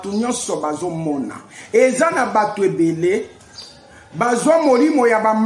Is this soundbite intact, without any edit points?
yes; 0 cuts

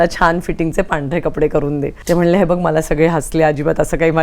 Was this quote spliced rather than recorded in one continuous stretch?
yes; 1 cut; at 1.9 s

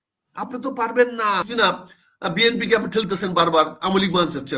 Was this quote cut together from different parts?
yes; 1 cut; at 1.5 s

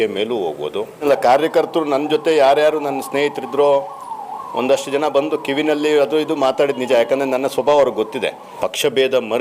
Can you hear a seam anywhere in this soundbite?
yes; 2 cuts; at 1.0 s, 8.5 s

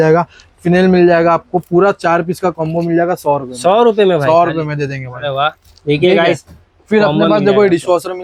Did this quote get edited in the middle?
no; 0 cuts

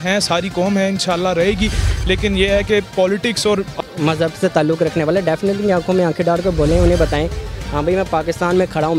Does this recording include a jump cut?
yes; 1 cut; at 3.7 s

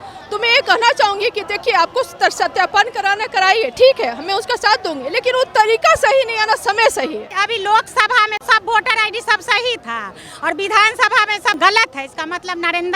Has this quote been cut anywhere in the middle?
yes; 3 cuts; at 7.4 s, 8.4 s, 11.6 s

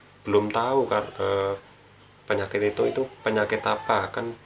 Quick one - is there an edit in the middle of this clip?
no; 0 cuts

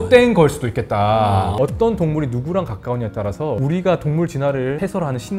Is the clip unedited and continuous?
no; 1 cut; at 1.5 s

